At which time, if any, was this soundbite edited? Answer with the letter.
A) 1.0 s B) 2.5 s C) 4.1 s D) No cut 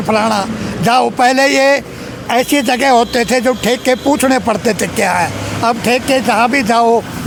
D